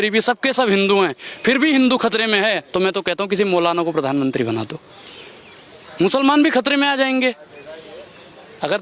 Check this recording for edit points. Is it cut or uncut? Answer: uncut